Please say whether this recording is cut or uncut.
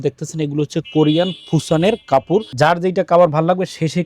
cut